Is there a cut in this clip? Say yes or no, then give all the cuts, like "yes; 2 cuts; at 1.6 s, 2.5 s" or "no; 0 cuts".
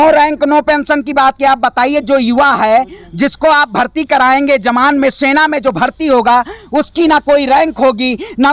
no; 0 cuts